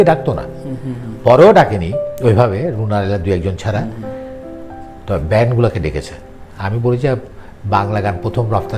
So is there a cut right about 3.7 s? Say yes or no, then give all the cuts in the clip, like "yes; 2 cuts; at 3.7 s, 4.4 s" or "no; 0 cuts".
no; 0 cuts